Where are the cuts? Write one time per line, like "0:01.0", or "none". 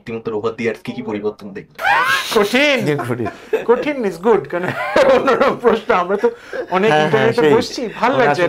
0:01.7